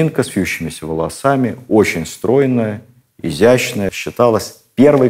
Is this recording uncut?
no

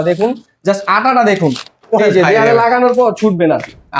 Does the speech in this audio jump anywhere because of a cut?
no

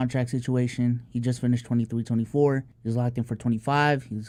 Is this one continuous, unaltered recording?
yes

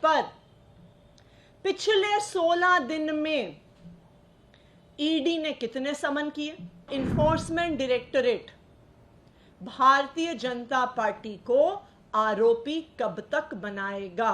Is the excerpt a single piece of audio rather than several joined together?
no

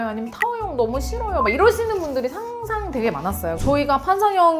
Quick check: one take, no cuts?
no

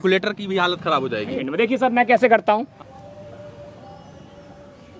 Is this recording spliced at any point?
yes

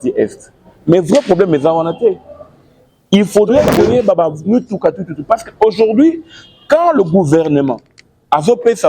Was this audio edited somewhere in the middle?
yes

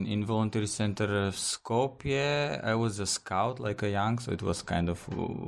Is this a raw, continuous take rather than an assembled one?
yes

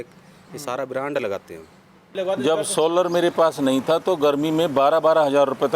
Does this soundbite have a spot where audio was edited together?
yes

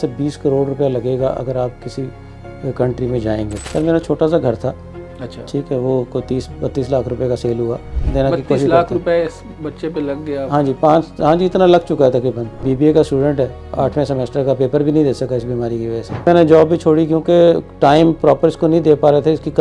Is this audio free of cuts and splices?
no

